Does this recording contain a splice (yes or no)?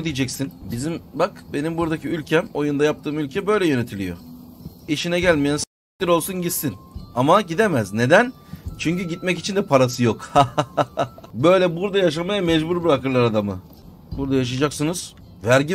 no